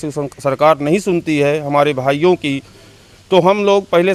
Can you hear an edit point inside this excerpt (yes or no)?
no